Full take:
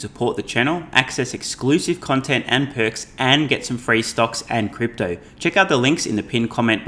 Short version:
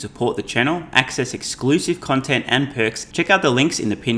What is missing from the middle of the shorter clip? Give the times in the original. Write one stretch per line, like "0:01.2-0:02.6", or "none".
0:03.0-0:05.3